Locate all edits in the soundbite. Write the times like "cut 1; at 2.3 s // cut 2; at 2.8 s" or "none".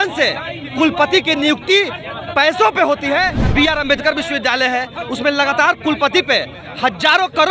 cut 1; at 3.4 s